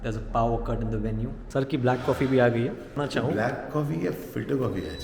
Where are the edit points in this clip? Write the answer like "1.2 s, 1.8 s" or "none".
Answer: 1.4 s, 3.0 s